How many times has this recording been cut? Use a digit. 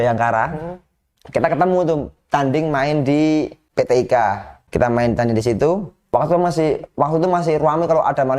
3